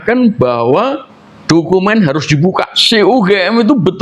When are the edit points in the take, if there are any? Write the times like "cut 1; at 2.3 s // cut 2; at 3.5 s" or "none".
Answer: cut 1; at 2.8 s